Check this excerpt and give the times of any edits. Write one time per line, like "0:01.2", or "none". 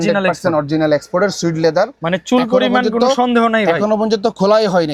none